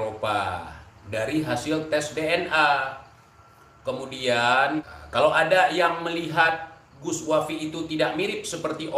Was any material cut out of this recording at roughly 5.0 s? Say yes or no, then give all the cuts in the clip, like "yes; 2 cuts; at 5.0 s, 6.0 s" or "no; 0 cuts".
yes; 1 cut; at 5.0 s